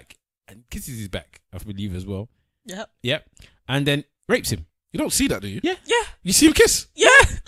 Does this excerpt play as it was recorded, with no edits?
yes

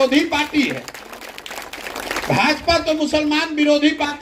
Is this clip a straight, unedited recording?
yes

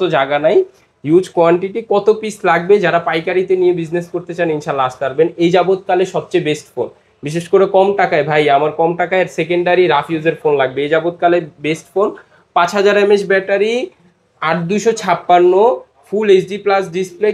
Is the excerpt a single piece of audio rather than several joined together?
yes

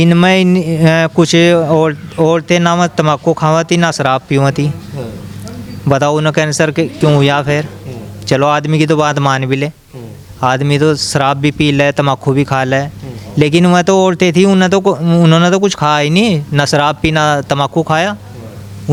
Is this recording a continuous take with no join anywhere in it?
yes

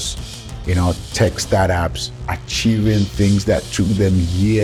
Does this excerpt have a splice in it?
no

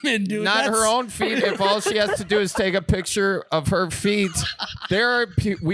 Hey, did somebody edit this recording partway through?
no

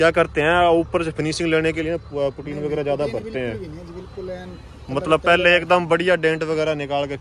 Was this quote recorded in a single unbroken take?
yes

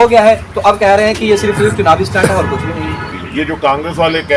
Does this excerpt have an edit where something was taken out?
yes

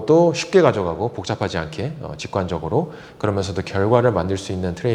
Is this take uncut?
yes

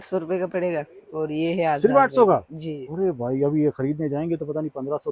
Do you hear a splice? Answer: no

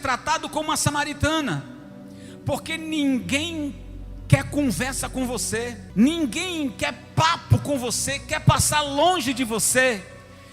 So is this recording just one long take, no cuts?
no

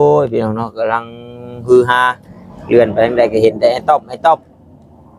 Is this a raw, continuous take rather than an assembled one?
yes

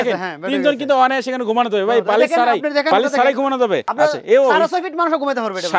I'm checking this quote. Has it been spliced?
yes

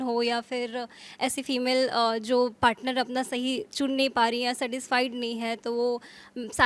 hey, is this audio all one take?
yes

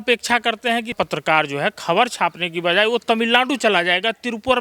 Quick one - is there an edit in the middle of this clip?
yes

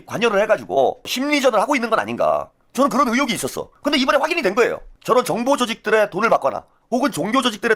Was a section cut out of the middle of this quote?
yes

